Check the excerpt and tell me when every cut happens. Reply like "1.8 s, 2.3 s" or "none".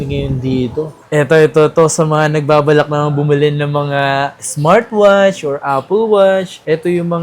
1.0 s